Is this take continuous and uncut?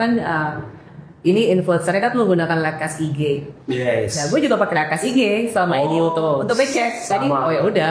yes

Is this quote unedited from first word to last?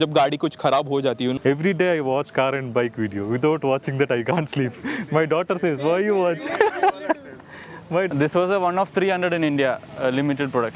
no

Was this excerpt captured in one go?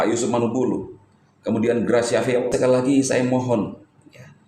no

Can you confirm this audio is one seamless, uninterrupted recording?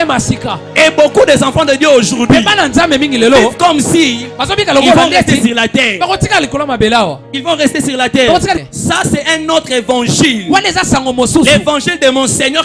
no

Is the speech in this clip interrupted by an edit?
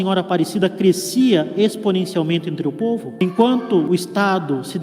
yes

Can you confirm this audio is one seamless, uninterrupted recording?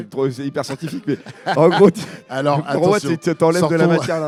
yes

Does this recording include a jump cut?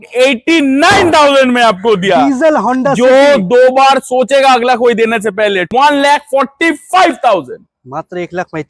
yes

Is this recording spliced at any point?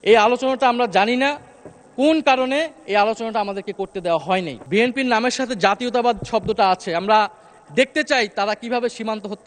yes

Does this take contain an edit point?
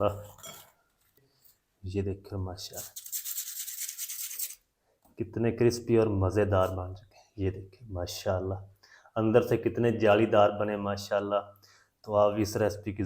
yes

